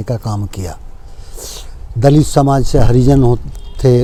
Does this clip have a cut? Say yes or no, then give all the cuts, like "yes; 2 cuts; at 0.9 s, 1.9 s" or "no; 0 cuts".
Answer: no; 0 cuts